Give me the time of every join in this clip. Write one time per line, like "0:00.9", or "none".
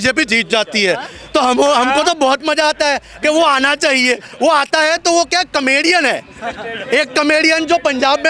none